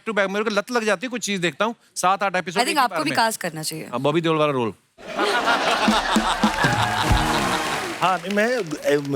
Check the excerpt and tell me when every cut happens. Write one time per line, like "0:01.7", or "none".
0:07.9

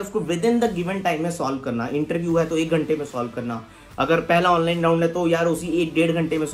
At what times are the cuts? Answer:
none

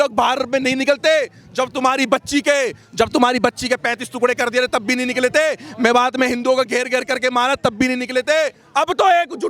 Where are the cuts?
0:08.6

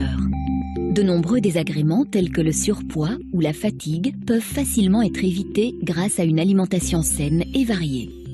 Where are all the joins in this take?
0:07.1

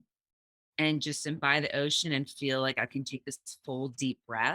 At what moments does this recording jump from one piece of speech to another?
none

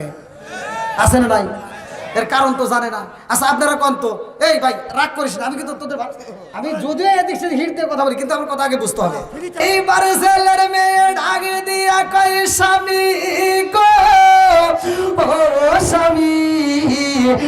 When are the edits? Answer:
0:09.6

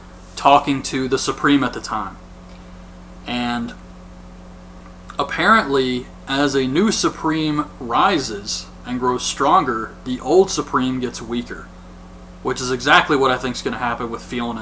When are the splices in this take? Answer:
0:13.5

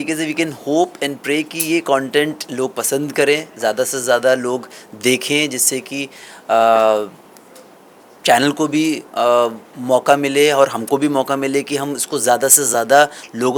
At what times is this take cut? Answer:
none

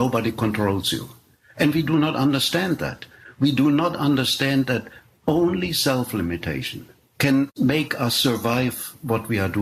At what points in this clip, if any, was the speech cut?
0:01.2

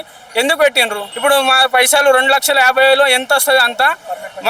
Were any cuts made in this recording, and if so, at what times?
0:01.0

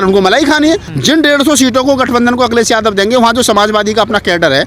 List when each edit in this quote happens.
0:00.9

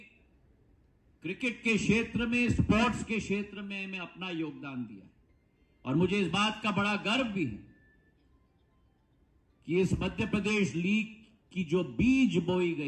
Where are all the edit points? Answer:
none

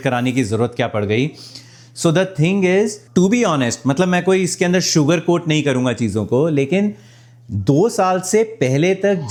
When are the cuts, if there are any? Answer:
none

